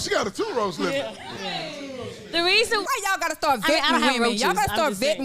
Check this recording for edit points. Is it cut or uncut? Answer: cut